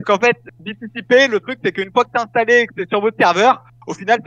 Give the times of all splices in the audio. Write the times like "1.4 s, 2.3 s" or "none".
none